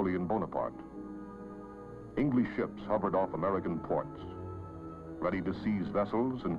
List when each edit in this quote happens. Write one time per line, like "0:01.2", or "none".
0:00.9